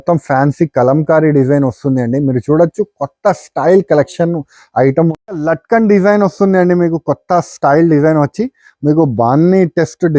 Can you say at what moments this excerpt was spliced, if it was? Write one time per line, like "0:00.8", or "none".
0:05.1

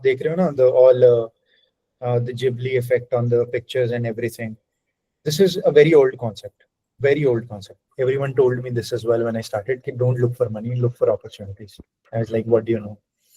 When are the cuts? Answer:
0:07.8

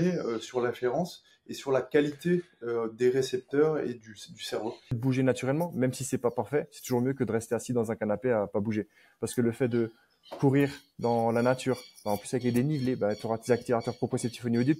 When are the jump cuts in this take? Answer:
0:05.0

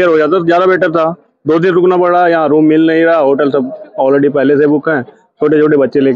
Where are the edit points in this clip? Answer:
none

